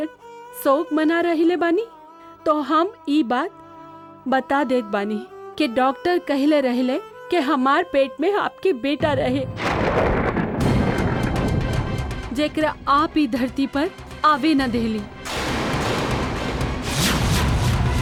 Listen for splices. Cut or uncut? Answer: uncut